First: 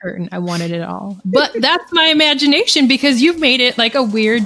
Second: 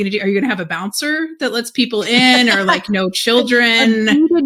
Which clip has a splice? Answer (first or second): first